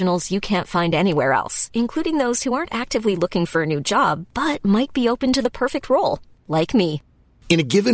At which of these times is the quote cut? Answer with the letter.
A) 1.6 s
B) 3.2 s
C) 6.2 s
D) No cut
D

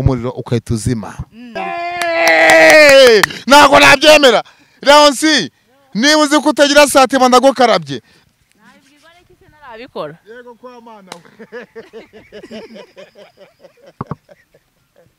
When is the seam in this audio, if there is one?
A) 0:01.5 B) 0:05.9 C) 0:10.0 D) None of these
A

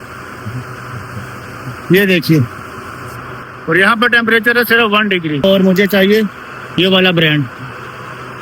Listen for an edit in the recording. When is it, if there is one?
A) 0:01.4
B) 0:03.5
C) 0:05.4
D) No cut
C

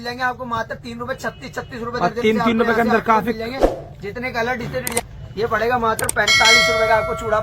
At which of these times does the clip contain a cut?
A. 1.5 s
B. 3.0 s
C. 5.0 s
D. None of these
C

